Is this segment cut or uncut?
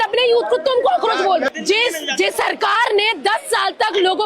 cut